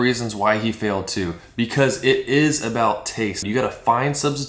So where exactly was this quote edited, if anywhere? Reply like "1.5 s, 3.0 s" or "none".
3.5 s